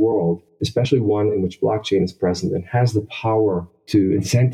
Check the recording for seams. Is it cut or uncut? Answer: uncut